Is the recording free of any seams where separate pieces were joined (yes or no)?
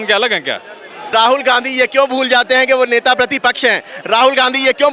no